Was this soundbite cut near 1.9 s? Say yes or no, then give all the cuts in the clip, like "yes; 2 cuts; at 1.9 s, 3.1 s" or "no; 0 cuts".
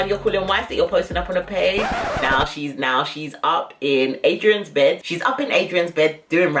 no; 0 cuts